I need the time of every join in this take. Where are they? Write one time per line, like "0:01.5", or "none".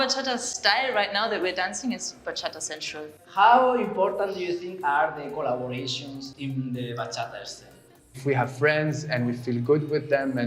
0:03.1
0:08.2